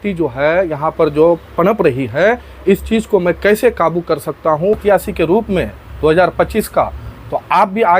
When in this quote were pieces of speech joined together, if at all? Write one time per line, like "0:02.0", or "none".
0:04.8